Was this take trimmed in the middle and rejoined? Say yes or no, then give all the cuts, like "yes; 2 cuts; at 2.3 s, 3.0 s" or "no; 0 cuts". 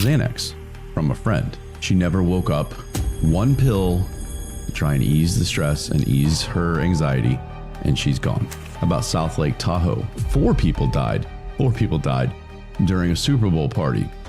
no; 0 cuts